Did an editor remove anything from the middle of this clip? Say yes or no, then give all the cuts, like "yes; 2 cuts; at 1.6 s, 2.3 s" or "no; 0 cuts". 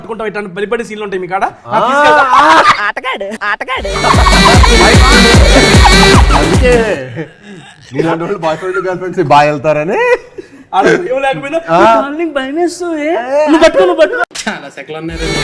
yes; 1 cut; at 14.4 s